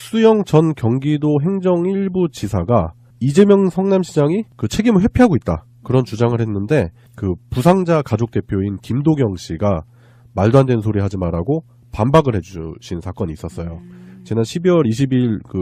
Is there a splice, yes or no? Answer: no